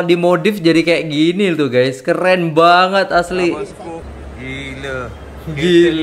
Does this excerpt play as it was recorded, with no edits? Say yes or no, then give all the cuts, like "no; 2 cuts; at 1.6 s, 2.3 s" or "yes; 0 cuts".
no; 1 cut; at 4.1 s